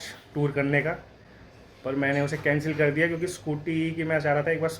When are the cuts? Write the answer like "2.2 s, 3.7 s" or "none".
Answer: none